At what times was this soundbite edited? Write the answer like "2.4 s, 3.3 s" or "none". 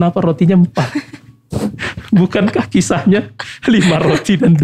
none